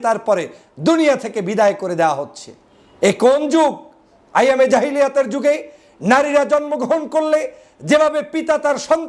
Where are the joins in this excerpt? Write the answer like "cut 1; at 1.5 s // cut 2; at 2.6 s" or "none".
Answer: none